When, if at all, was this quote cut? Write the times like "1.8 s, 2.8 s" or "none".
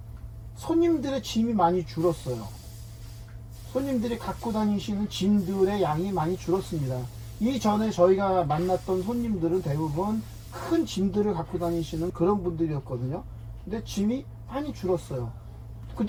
none